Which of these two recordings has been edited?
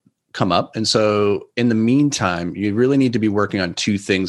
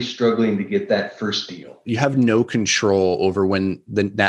second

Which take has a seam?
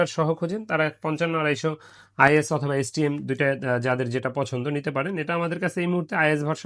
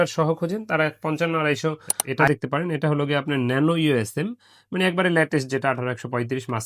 second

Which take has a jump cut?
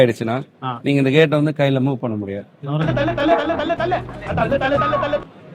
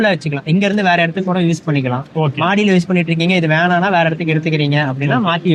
first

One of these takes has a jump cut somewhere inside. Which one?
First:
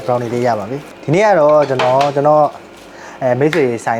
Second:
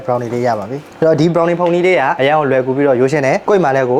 second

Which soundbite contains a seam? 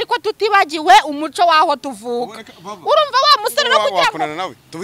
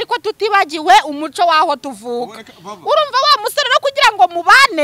first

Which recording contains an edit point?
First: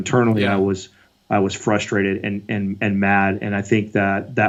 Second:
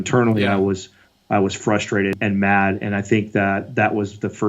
second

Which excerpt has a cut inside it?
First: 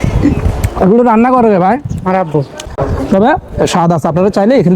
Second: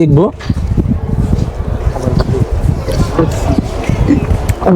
first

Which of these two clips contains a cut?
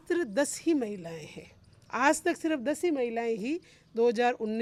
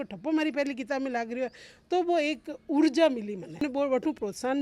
second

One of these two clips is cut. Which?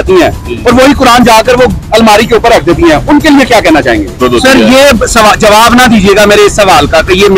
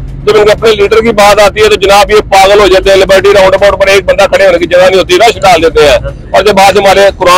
first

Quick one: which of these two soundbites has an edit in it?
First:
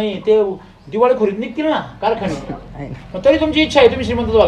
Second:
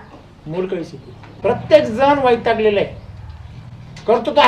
second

